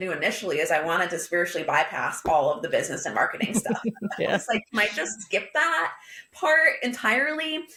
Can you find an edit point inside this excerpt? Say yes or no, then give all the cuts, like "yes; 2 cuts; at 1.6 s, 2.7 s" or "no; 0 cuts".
no; 0 cuts